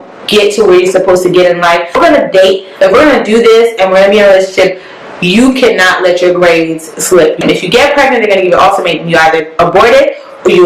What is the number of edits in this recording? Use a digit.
2